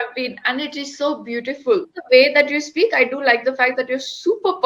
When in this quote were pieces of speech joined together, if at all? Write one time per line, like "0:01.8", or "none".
0:01.9